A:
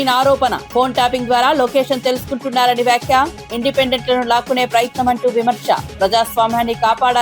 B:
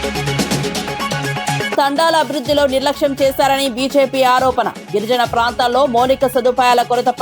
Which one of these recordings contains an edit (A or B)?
B